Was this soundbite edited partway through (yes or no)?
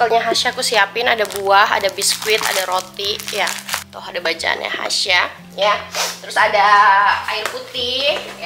no